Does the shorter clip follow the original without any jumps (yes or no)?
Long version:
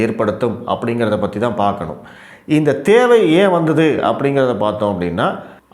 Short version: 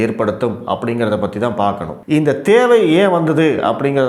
no